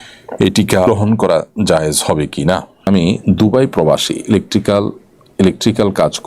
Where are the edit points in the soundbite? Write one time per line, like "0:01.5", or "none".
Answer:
0:00.9
0:02.9